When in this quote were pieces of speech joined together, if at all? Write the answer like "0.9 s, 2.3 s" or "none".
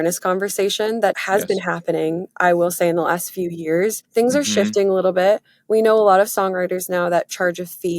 1.2 s, 4.0 s